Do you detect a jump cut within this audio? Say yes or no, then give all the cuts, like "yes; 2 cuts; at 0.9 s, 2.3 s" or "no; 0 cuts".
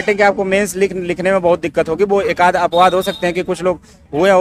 no; 0 cuts